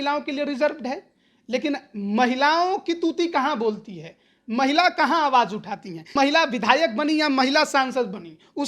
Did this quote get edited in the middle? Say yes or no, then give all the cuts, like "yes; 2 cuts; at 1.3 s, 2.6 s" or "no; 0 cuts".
yes; 1 cut; at 6.1 s